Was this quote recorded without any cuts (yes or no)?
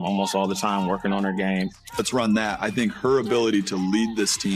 no